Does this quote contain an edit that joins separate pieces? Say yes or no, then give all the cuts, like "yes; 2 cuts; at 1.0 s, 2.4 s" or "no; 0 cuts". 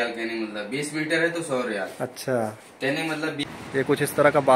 yes; 1 cut; at 3.4 s